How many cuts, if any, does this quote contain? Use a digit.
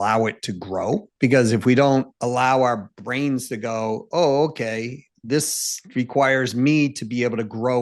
2